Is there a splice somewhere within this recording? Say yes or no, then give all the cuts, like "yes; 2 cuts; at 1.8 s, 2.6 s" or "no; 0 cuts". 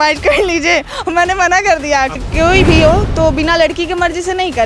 yes; 1 cut; at 2.2 s